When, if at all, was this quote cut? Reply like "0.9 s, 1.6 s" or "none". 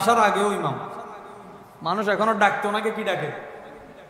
none